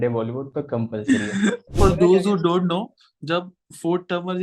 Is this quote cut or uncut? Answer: cut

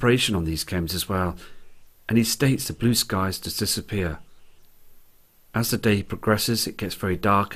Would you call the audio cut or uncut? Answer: cut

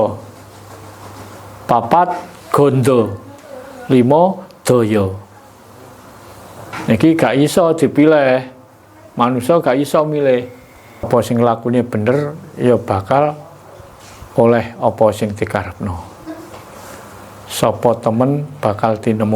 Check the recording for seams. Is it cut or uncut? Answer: cut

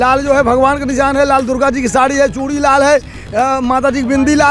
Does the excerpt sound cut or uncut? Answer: uncut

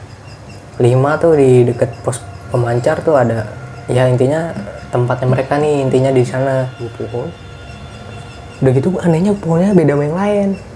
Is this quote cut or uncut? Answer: cut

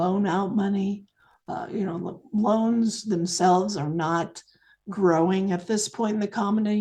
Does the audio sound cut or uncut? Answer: uncut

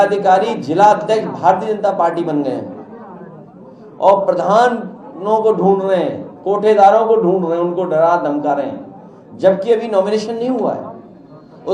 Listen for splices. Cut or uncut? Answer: uncut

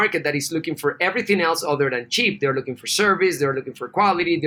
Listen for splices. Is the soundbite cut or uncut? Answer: uncut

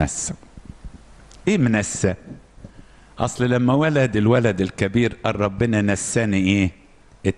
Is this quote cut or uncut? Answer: uncut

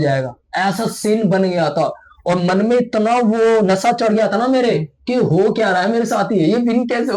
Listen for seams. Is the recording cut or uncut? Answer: uncut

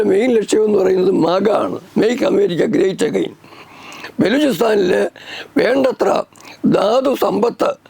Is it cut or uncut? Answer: cut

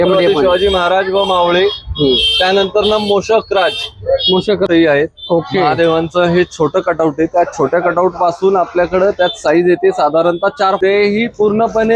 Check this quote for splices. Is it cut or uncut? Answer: cut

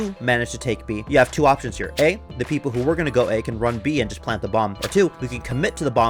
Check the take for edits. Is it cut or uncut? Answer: uncut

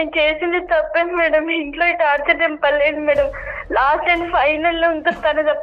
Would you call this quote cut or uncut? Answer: uncut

